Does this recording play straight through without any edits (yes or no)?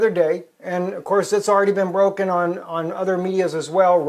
no